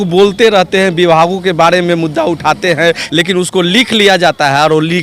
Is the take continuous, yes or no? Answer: no